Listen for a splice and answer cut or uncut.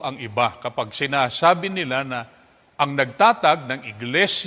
uncut